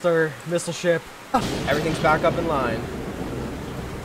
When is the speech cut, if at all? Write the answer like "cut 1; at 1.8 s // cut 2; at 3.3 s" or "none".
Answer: cut 1; at 1.4 s